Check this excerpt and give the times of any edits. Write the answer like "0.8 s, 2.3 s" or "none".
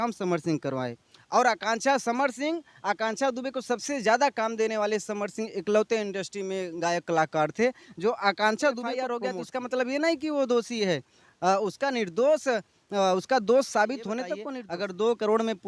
9.1 s, 14.4 s